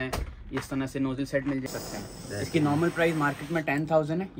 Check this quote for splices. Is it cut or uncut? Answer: cut